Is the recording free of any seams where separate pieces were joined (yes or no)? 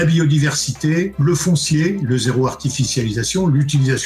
no